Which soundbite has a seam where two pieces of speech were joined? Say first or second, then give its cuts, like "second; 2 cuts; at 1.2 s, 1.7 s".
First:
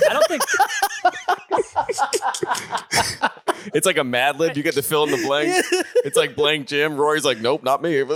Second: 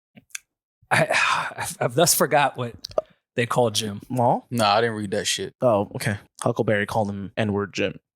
second; 3 cuts; at 4.5 s, 6.2 s, 7.3 s